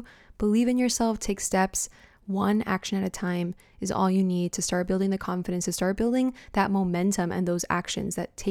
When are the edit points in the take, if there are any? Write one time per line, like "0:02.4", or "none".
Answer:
none